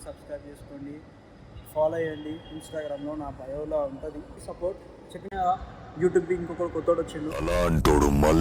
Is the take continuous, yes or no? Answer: no